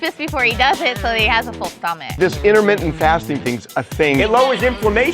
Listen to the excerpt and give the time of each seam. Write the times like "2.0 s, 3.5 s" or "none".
2.1 s, 4.2 s